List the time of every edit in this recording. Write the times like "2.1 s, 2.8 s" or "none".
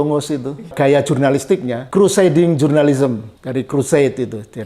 0.7 s, 1.8 s, 3.3 s